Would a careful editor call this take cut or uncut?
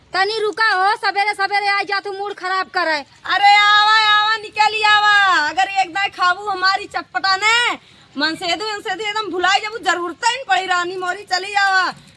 uncut